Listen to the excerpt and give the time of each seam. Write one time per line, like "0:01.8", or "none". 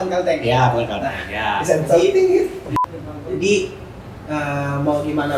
0:02.7